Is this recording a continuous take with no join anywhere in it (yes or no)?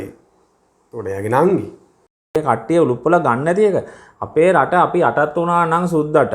no